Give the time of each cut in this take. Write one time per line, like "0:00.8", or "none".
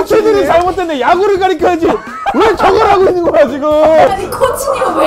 0:04.1